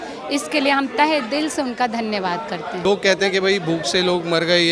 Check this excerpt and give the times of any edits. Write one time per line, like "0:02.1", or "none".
0:02.8